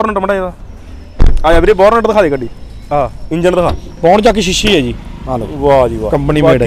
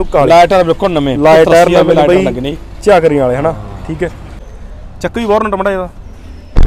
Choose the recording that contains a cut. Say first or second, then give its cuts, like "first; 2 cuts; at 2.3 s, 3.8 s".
second; 1 cut; at 4.4 s